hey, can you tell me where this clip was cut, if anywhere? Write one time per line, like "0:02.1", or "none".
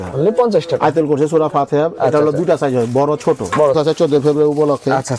0:03.8